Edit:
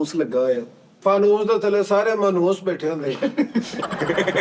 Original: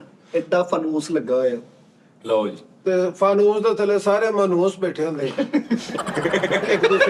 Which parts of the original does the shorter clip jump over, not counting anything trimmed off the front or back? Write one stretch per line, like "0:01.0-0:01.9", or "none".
0:01.9-0:03.1